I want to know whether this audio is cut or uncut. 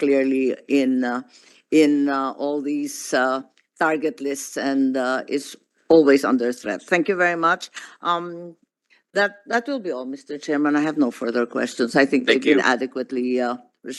uncut